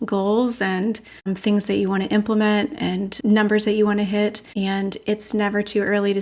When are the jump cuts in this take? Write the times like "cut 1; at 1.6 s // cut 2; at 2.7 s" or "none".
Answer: cut 1; at 1.3 s // cut 2; at 3.1 s // cut 3; at 4.4 s

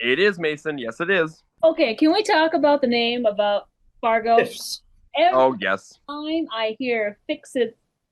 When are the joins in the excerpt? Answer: cut 1; at 1.4 s

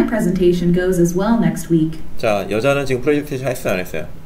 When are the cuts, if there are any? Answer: none

